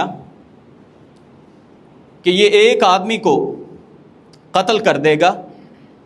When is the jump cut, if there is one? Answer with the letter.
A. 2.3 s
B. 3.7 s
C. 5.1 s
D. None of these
D